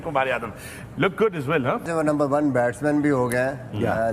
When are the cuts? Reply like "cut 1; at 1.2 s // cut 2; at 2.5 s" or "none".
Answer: cut 1; at 1.8 s